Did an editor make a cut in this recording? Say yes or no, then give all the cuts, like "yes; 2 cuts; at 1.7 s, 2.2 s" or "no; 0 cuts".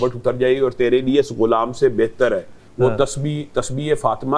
no; 0 cuts